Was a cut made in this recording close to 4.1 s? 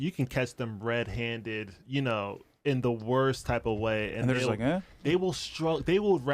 no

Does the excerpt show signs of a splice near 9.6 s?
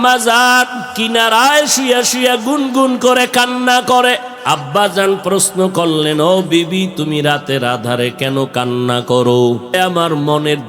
yes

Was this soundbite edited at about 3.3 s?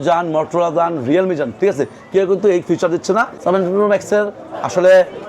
yes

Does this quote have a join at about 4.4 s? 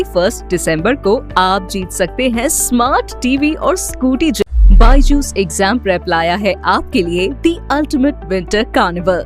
yes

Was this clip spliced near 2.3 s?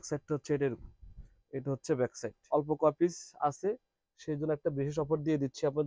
yes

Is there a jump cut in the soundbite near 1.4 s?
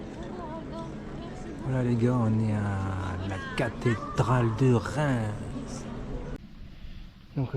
no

